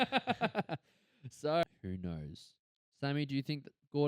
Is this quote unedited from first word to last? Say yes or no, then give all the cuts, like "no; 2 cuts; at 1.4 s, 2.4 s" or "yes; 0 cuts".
no; 1 cut; at 1.6 s